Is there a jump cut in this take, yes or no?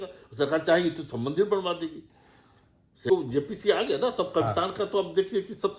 yes